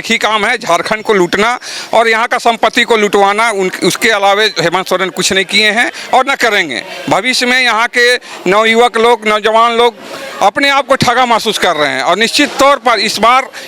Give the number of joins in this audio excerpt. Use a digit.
0